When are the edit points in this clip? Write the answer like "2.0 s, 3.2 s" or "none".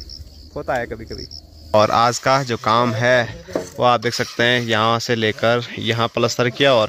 1.7 s